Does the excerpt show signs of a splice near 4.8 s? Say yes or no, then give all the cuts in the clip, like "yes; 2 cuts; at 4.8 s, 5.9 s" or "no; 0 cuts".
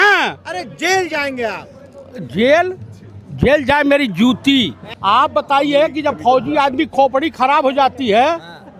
yes; 1 cut; at 4.8 s